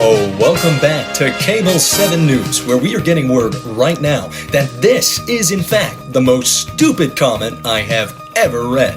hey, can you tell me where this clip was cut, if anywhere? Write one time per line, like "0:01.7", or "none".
none